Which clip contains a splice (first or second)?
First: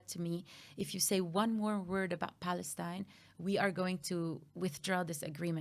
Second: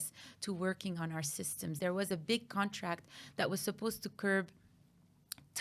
second